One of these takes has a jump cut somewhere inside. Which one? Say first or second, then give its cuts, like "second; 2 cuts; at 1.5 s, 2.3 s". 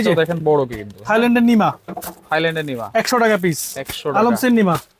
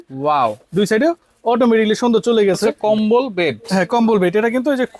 second; 1 cut; at 2.8 s